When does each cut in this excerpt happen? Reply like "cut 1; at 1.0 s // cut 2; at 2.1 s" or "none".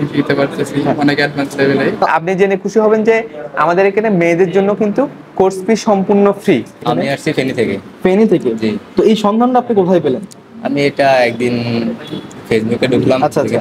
cut 1; at 2.0 s // cut 2; at 6.8 s